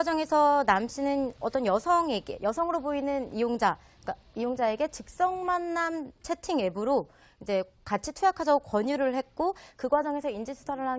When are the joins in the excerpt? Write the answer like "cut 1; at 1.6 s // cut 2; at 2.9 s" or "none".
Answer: cut 1; at 6.7 s